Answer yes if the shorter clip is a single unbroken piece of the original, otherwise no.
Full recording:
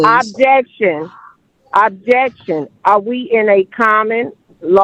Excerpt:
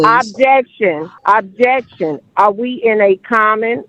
no